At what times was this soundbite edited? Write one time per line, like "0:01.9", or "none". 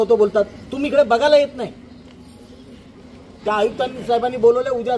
0:03.4